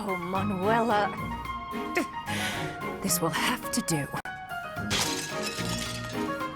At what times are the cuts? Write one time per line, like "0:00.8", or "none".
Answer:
0:04.2